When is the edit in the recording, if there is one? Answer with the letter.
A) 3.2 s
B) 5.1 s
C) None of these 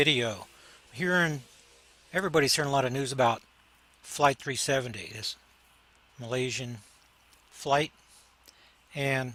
C